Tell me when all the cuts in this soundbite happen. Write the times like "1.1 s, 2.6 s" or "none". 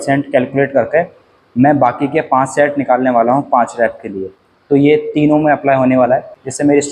none

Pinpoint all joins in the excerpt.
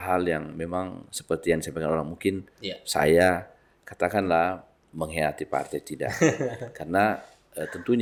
none

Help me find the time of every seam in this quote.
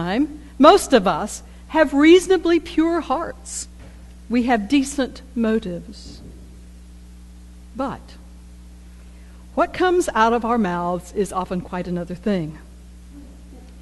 8.1 s

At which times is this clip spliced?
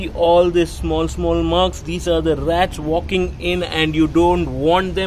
none

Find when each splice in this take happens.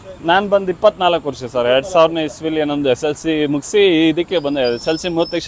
none

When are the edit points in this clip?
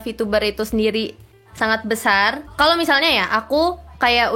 2.4 s

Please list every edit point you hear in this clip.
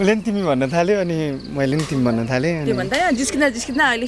none

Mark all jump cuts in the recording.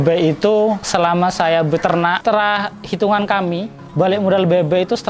0.8 s, 2.2 s

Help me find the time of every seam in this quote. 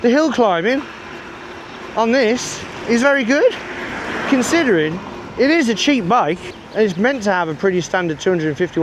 none

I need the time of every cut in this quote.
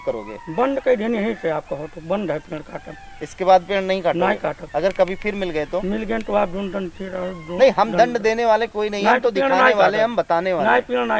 none

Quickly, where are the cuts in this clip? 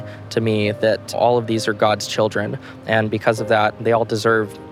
1.2 s

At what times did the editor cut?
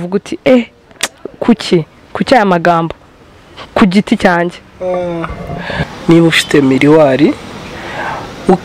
5.7 s

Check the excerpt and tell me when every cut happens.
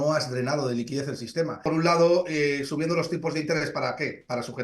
1.7 s

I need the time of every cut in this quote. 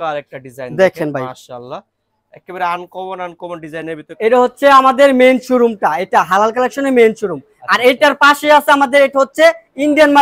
4.1 s

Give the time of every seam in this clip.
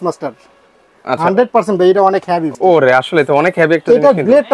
2.5 s

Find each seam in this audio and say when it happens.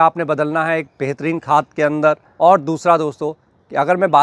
none

